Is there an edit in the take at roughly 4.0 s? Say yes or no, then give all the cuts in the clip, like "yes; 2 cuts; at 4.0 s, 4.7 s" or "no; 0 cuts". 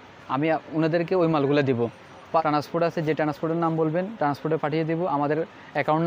no; 1 cut; at 2.4 s